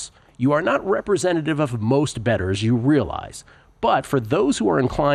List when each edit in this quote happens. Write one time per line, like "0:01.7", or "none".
none